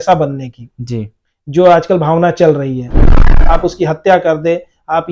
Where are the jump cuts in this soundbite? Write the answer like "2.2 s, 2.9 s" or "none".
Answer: 3.2 s